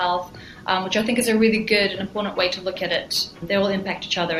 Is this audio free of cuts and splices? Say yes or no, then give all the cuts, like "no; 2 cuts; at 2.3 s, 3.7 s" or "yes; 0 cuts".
no; 1 cut; at 3.4 s